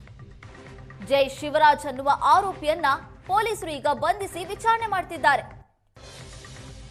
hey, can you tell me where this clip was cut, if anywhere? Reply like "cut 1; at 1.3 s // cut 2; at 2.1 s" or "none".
cut 1; at 1.0 s